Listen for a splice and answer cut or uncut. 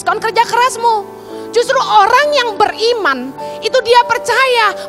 uncut